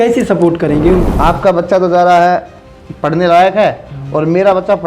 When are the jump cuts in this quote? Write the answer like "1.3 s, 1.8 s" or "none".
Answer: 1.1 s